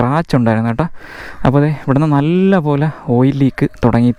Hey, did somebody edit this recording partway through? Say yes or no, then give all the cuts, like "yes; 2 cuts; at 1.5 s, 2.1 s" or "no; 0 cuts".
no; 0 cuts